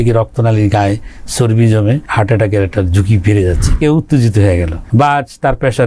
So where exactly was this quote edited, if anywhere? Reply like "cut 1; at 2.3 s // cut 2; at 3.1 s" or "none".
cut 1; at 2.1 s // cut 2; at 3.7 s // cut 3; at 4.8 s